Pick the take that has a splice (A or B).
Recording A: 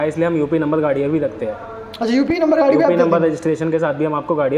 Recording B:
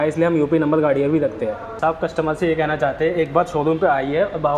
B